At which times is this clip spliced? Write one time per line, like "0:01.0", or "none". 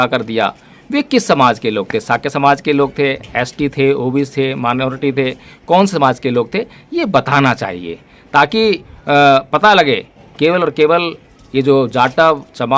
none